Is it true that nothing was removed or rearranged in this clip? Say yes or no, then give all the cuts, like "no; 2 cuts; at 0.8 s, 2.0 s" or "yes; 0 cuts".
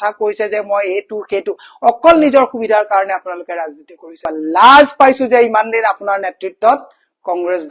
no; 1 cut; at 4.3 s